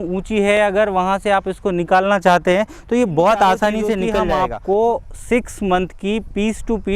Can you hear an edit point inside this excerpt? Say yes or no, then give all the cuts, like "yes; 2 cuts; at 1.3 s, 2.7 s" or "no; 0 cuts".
yes; 1 cut; at 4.1 s